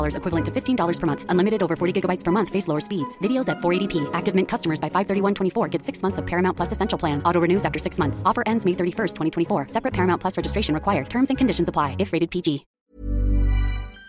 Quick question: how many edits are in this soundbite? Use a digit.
1